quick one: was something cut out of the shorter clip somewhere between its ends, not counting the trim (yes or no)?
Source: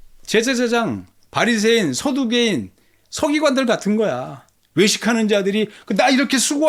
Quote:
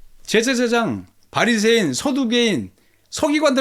no